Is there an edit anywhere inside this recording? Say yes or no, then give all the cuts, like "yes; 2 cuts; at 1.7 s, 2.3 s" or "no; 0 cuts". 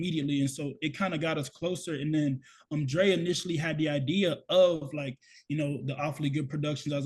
no; 0 cuts